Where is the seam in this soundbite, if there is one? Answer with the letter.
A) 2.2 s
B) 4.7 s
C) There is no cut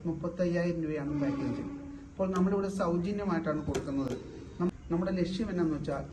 B